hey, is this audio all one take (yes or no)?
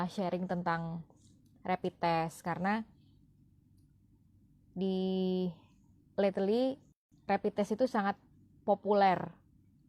yes